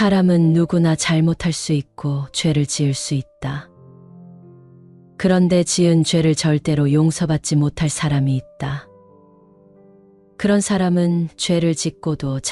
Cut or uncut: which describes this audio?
cut